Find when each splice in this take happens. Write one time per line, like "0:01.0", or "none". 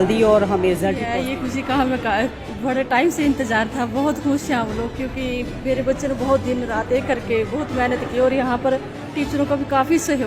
0:01.0

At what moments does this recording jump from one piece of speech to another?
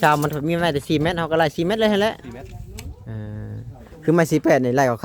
none

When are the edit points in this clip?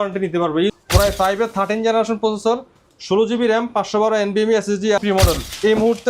0:00.8
0:05.0

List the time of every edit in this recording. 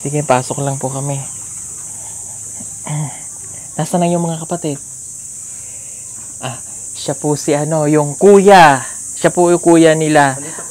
none

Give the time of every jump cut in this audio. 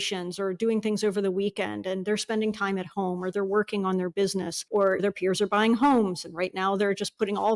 none

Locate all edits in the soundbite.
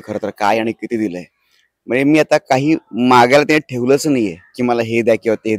none

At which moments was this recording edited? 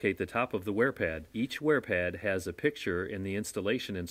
0:01.2

